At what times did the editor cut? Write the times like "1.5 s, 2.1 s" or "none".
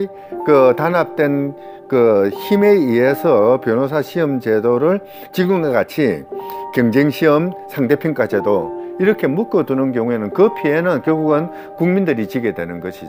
none